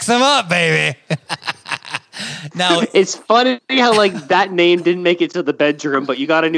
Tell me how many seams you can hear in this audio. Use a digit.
0